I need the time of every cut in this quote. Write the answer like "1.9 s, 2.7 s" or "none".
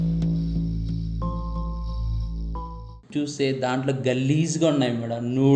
3.1 s